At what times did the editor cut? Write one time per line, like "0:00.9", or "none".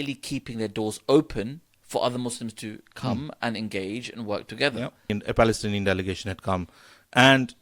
0:05.1